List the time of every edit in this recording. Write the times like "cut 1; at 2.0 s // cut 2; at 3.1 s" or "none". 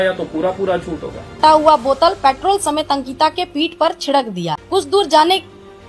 cut 1; at 1.4 s // cut 2; at 4.5 s